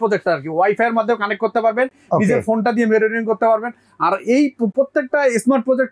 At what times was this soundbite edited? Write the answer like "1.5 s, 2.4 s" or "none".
none